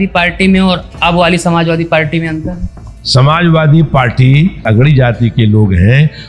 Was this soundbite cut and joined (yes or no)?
yes